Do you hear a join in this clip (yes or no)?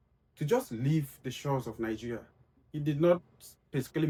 no